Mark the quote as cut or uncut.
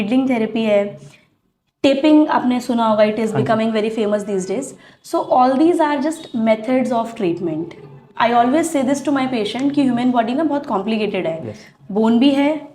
uncut